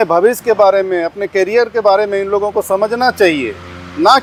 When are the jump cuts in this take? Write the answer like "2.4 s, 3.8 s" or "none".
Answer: none

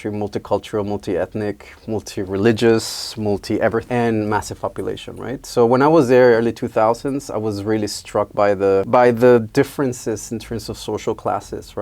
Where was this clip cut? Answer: 3.9 s

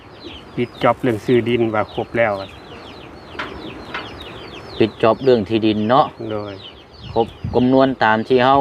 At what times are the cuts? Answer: none

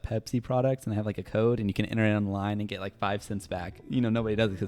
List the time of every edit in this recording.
3.7 s

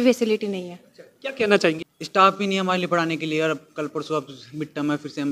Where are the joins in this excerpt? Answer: 1.9 s

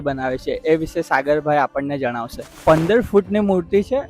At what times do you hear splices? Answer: 2.5 s

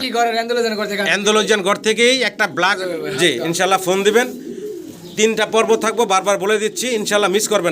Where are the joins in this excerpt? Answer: 2.8 s

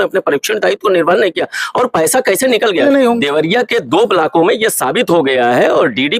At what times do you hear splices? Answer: 2.8 s

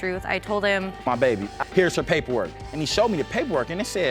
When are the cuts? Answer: 1.0 s

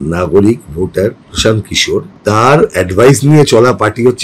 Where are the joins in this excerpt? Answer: 2.1 s

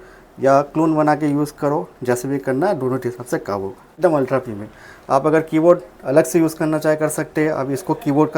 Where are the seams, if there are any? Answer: 4.0 s

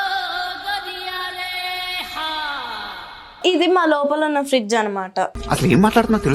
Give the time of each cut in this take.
3.4 s, 5.3 s

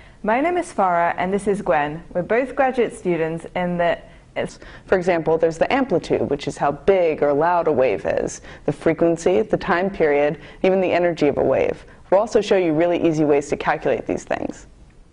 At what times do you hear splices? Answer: none

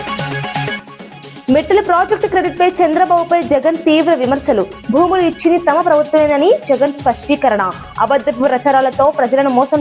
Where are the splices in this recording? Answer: none

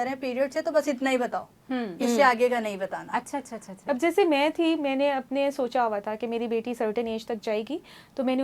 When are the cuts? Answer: 3.7 s

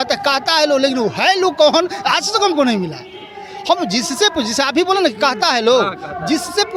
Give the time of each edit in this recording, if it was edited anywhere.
none

